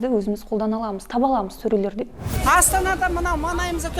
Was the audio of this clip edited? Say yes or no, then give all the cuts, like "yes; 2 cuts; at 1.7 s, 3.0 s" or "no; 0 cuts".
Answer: yes; 1 cut; at 2.3 s